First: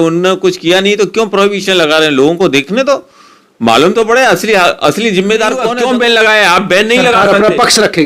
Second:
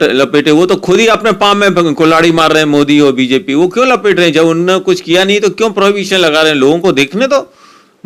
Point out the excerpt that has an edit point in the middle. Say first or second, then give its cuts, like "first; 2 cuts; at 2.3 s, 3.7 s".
first; 1 cut; at 5.7 s